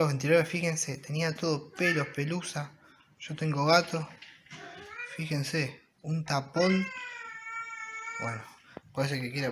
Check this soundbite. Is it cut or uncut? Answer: uncut